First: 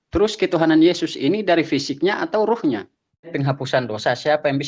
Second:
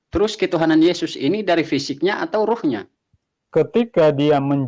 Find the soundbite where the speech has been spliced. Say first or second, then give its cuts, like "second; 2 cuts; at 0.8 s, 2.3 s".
first; 1 cut; at 3.3 s